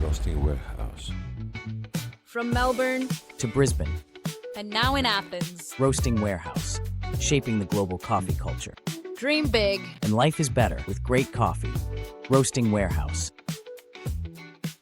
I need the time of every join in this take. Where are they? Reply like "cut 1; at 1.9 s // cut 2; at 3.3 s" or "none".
none